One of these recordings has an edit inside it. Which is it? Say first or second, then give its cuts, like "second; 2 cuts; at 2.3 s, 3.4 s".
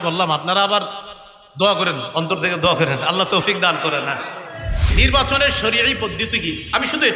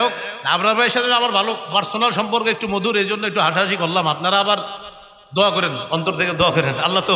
first; 1 cut; at 4.9 s